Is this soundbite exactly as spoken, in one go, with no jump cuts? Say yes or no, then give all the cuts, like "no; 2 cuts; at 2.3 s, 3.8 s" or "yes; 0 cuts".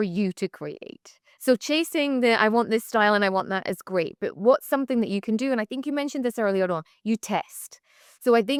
yes; 0 cuts